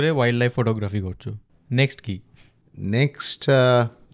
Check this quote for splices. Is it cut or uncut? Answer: uncut